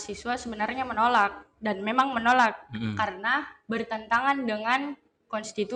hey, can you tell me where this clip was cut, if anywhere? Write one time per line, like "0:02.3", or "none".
none